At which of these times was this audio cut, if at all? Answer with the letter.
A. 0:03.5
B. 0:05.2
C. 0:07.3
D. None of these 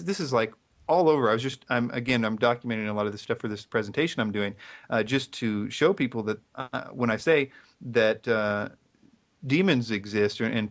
C